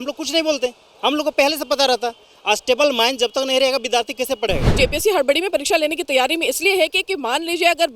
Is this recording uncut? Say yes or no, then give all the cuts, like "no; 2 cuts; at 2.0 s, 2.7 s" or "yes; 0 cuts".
no; 1 cut; at 4.7 s